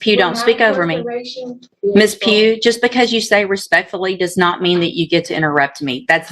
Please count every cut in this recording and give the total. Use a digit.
1